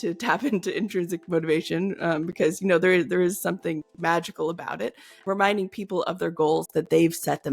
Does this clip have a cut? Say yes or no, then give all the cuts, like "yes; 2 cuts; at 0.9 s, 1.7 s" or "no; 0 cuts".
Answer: yes; 1 cut; at 5.1 s